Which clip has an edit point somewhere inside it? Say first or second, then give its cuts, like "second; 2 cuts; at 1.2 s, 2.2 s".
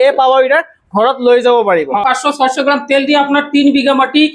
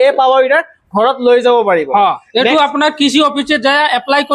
first; 1 cut; at 2.0 s